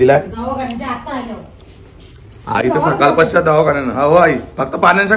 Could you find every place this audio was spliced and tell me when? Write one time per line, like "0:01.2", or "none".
none